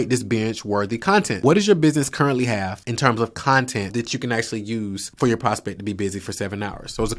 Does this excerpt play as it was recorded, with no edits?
no; 4 cuts; at 1.4 s, 2.8 s, 3.9 s, 5.1 s

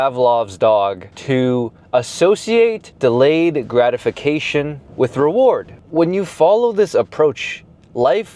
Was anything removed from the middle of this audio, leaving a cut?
yes; 4 cuts; at 1.1 s, 2.9 s, 4.8 s, 5.8 s

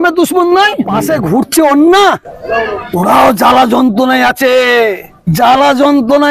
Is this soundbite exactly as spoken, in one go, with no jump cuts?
no; 3 cuts; at 1.0 s, 2.8 s, 5.1 s

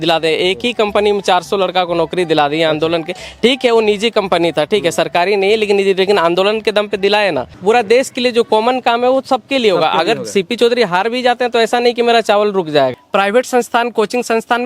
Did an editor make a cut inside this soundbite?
yes; 2 cuts; at 7.5 s, 13.0 s

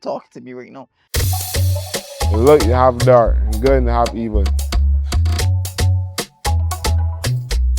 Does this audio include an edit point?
yes; 1 cut; at 1.0 s

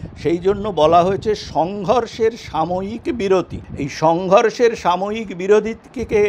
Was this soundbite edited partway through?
yes; 1 cut; at 3.6 s

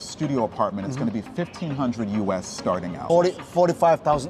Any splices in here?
yes; 1 cut; at 3.0 s

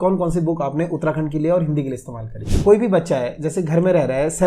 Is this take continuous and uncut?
no; 1 cut; at 2.5 s

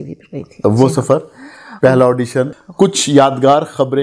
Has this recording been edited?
yes; 1 cut; at 2.6 s

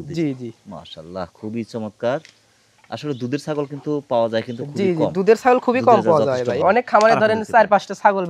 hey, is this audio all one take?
no; 1 cut; at 6.6 s

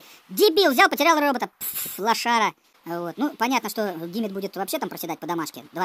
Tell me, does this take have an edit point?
yes; 1 cut; at 2.7 s

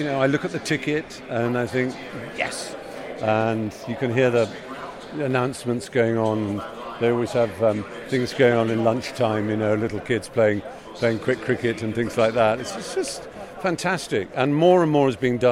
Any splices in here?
no; 0 cuts

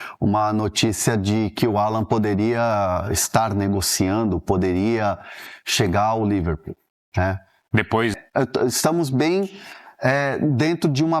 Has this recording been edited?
yes; 1 cut; at 8.1 s

